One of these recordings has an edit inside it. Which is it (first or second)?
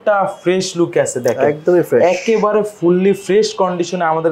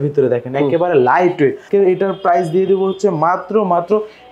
second